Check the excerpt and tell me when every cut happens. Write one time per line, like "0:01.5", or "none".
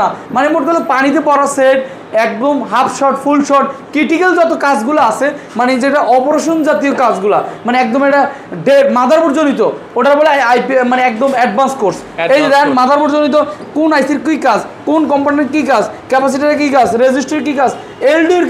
none